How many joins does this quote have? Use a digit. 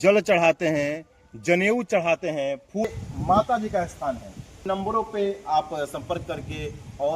2